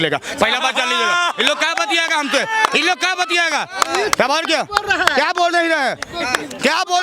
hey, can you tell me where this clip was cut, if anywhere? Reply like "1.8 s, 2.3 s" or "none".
none